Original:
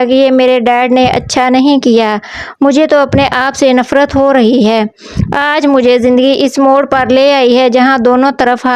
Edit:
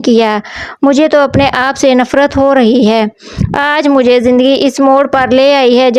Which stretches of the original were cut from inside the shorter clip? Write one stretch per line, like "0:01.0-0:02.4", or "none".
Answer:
none